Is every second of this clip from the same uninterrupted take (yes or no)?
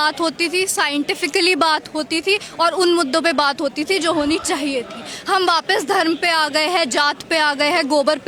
yes